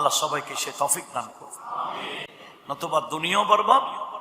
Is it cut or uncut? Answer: uncut